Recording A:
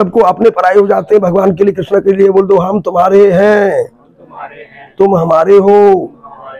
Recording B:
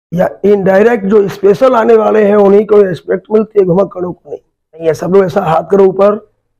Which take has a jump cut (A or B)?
B